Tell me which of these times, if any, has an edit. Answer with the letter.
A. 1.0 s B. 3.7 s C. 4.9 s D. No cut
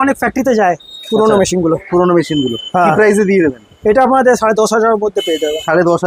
D